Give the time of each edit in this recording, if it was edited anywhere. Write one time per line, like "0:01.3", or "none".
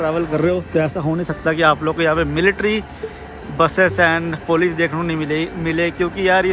none